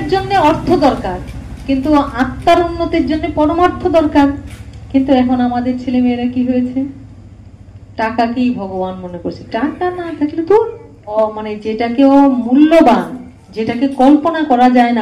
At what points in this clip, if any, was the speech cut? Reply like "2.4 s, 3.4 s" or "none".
11.1 s